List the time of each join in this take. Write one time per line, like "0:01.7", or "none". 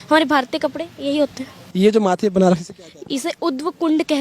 0:01.6

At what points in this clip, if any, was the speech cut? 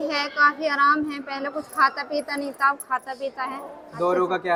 none

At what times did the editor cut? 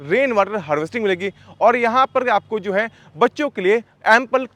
none

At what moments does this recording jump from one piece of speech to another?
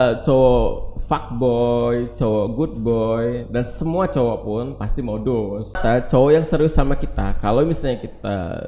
0:05.8

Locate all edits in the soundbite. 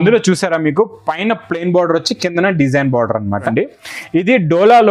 0:03.5

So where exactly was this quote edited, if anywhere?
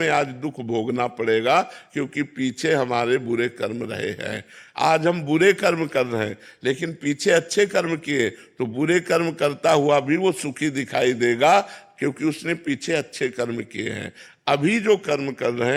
none

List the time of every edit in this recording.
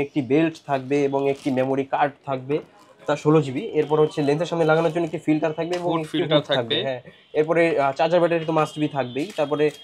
none

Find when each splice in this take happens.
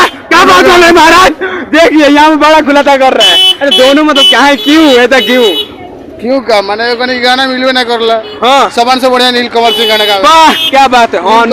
none

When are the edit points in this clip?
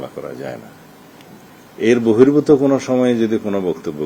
none

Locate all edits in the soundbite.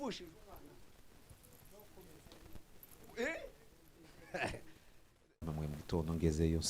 0:05.5

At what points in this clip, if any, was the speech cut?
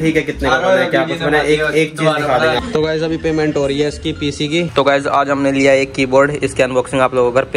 0:02.6
0:04.7

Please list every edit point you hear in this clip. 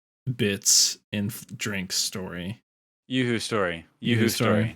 none

